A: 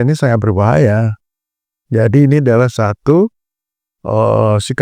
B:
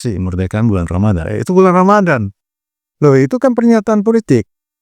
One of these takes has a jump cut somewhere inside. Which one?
B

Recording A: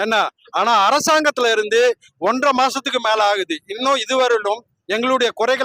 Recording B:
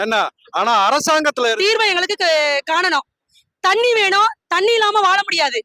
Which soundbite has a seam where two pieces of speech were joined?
B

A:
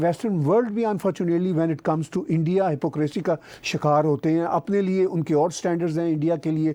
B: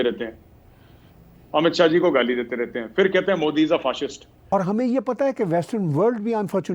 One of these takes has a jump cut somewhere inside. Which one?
B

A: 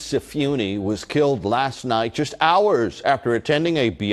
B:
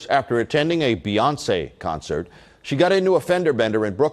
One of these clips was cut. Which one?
B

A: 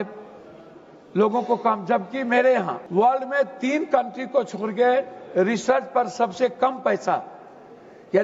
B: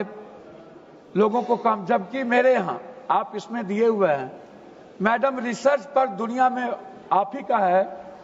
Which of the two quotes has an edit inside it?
A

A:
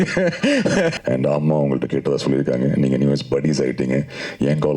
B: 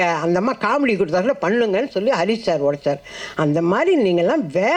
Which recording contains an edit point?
A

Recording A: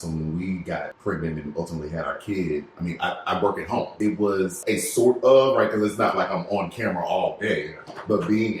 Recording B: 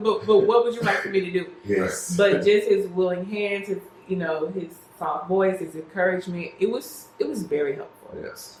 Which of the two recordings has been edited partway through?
A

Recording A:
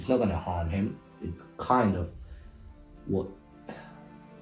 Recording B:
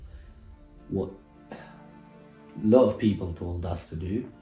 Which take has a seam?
A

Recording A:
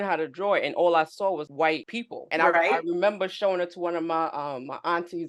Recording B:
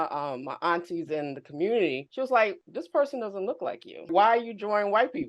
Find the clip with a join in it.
B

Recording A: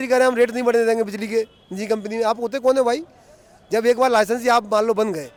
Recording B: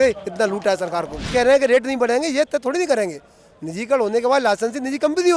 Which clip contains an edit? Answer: B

